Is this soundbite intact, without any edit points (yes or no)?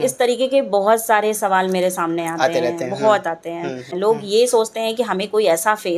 no